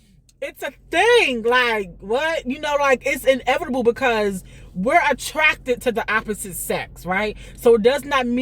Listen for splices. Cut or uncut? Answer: uncut